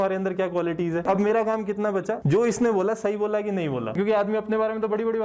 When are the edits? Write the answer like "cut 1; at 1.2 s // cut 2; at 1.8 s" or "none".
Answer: cut 1; at 1.1 s // cut 2; at 2.2 s // cut 3; at 4.0 s